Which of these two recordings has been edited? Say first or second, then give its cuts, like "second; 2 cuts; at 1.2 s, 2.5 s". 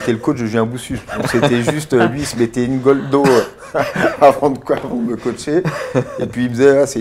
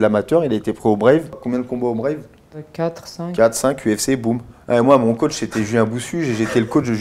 second; 3 cuts; at 1.4 s, 2.7 s, 4.5 s